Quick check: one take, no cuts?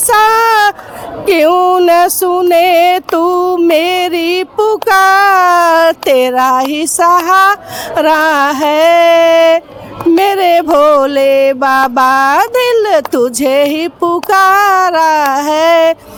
yes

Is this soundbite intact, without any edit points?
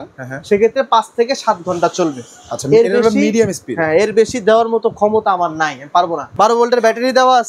yes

